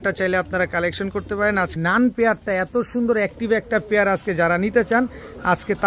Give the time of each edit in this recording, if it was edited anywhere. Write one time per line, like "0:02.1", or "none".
0:01.7